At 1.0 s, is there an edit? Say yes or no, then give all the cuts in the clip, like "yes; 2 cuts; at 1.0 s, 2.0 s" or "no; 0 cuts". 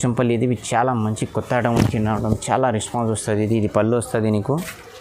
no; 0 cuts